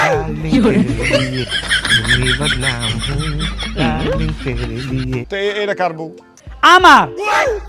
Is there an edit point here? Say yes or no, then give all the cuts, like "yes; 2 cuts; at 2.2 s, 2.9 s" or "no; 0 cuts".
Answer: yes; 1 cut; at 5.3 s